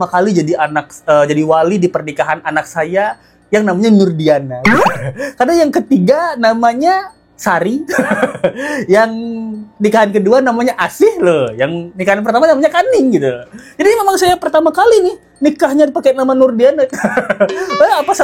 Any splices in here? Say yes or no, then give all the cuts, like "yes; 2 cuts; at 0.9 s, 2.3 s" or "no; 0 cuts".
no; 0 cuts